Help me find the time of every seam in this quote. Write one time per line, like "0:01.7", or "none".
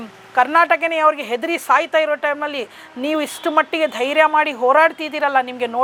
none